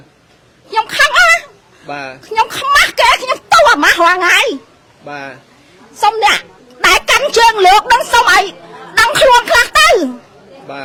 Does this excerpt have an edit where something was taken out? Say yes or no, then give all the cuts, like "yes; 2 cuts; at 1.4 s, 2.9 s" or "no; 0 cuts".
no; 0 cuts